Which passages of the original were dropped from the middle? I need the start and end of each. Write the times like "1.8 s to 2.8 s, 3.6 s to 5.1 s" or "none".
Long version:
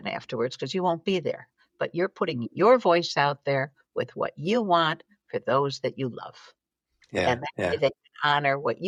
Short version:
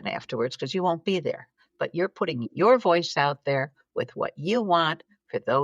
none